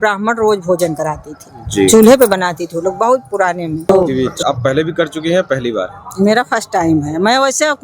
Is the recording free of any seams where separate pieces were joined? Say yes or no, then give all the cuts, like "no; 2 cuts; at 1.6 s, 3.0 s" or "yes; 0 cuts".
no; 1 cut; at 3.9 s